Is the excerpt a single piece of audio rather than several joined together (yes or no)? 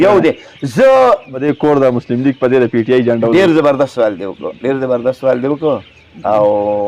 no